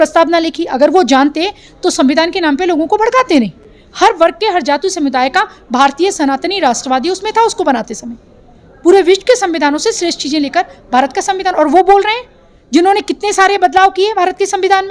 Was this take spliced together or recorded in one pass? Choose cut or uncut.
uncut